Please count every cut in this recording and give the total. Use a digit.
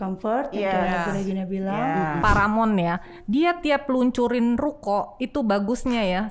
1